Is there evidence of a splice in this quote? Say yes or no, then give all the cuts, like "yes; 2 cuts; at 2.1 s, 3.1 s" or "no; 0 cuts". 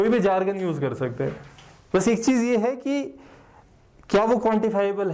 no; 0 cuts